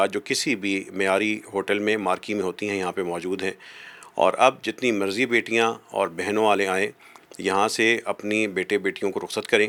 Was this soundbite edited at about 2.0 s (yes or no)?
no